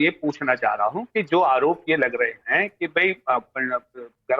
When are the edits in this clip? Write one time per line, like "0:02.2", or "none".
0:03.2